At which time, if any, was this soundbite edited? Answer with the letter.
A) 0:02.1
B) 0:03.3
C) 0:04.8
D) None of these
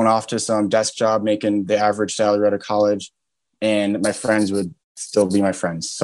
D